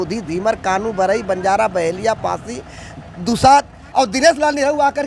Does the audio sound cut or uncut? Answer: cut